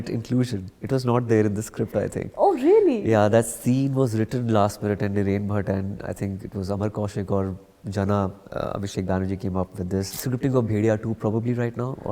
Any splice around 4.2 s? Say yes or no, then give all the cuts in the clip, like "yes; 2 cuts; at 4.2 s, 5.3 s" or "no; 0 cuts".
no; 1 cut; at 10.1 s